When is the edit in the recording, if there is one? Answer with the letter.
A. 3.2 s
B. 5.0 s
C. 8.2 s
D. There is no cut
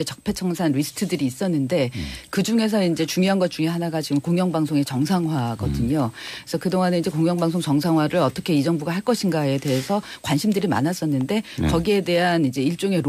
B